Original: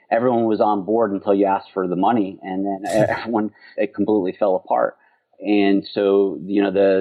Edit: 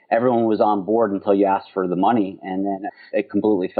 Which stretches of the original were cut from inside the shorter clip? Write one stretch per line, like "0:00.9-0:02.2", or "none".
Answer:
0:02.9-0:03.5